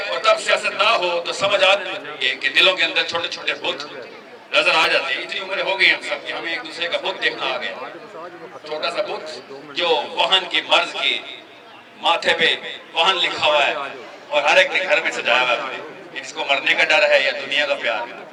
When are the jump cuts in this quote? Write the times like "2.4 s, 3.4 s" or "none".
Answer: none